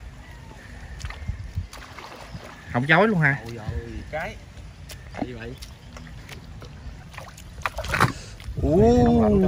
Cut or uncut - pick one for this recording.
cut